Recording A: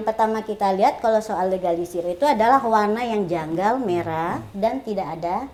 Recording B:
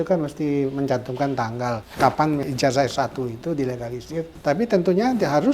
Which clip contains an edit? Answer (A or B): B